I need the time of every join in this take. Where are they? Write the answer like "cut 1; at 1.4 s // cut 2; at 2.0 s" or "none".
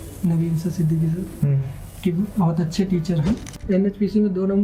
cut 1; at 3.5 s